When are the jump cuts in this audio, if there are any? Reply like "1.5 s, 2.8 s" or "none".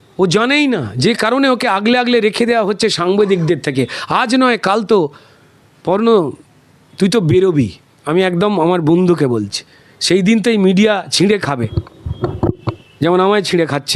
none